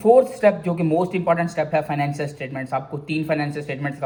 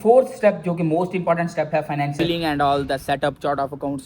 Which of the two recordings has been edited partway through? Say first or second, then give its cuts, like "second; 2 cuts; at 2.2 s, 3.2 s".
second; 1 cut; at 2.1 s